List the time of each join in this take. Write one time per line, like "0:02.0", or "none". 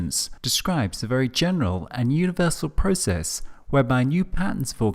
0:03.0